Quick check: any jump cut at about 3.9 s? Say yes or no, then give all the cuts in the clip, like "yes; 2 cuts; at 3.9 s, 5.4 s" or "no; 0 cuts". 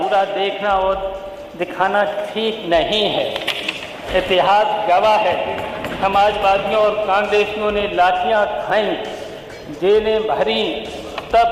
yes; 1 cut; at 3.9 s